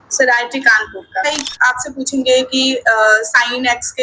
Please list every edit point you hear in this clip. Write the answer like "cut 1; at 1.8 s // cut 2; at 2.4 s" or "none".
cut 1; at 1.2 s